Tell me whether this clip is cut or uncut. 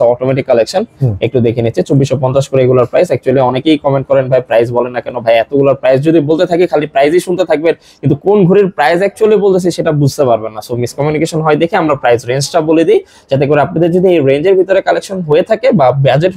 uncut